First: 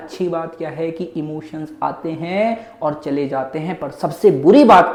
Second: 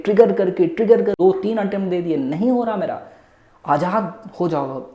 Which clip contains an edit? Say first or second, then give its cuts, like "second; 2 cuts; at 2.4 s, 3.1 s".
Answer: second; 1 cut; at 1.2 s